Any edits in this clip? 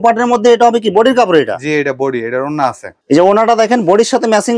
yes; 1 cut; at 3.0 s

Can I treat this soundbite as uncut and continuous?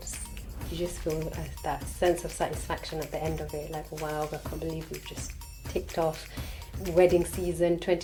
yes; 0 cuts

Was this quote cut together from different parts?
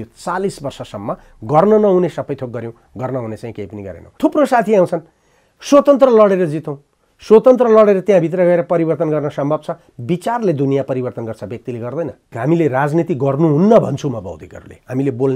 yes; 2 cuts; at 4.0 s, 12.4 s

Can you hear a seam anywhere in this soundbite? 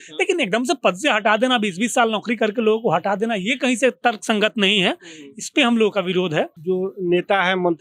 yes; 1 cut; at 6.6 s

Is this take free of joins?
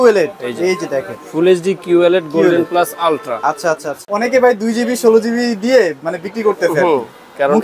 no; 1 cut; at 4.0 s

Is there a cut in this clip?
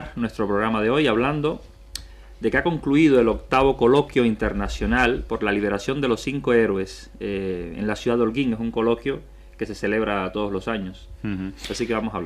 yes; 1 cut; at 8.1 s

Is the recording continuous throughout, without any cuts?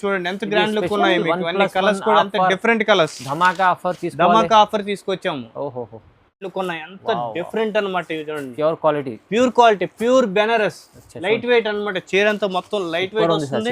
no; 1 cut; at 6.5 s

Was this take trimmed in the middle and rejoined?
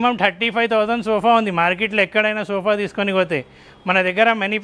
no; 0 cuts

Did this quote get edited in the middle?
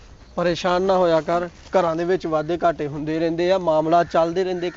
no; 0 cuts

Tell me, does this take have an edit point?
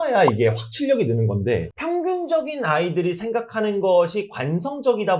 yes; 1 cut; at 1.7 s

